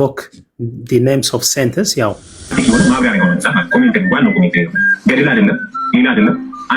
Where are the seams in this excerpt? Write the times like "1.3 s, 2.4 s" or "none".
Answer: 2.5 s